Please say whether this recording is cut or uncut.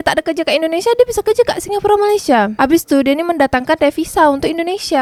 uncut